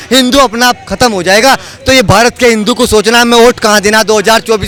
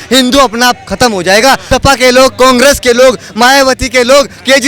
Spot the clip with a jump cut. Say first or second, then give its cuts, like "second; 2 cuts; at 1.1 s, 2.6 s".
second; 1 cut; at 1.6 s